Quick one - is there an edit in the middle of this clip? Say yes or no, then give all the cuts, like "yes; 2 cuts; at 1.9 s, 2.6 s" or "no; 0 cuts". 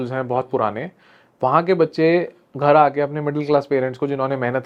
no; 0 cuts